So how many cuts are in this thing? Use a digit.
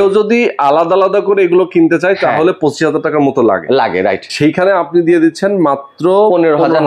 1